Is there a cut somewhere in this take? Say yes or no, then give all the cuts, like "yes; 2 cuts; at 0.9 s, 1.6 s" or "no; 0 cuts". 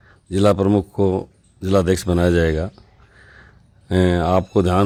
no; 0 cuts